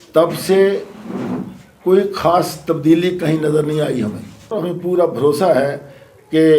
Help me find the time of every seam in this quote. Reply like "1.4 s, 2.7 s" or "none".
4.5 s